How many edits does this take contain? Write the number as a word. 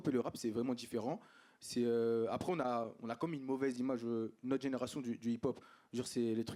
zero